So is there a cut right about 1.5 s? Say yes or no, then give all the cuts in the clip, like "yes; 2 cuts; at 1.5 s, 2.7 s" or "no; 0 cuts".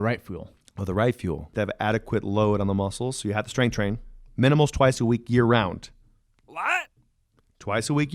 yes; 1 cut; at 1.5 s